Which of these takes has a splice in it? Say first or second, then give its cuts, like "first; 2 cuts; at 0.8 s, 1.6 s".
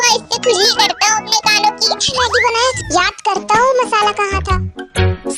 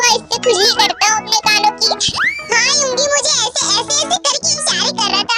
first; 1 cut; at 2.2 s